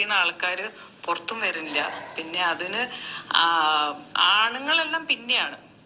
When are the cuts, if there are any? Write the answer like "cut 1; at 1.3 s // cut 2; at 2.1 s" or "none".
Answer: none